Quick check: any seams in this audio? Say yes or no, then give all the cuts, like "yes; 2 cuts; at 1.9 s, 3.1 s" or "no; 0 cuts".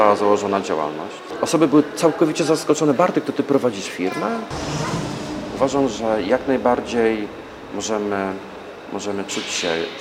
yes; 2 cuts; at 1.2 s, 5.0 s